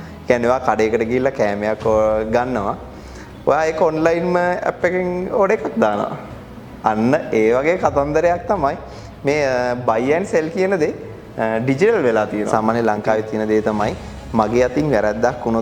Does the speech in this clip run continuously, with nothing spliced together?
no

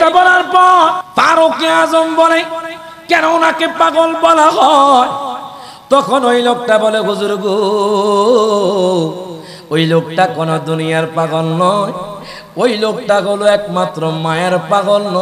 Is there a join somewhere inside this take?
yes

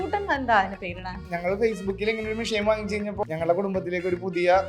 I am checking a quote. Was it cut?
yes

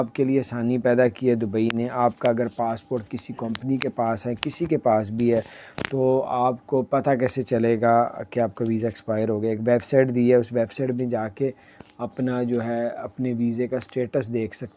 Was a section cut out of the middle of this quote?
no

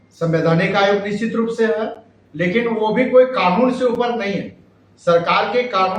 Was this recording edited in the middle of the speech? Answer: no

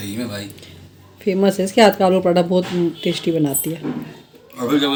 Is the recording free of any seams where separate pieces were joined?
yes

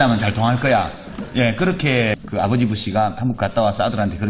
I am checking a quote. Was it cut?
yes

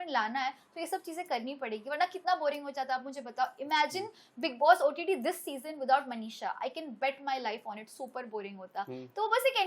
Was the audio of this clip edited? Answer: no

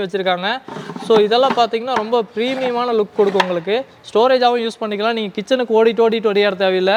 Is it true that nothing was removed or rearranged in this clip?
yes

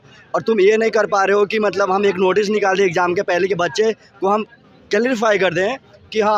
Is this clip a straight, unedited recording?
yes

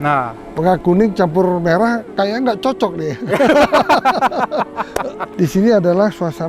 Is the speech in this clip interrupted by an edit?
yes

